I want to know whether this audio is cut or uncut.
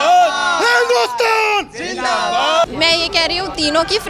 cut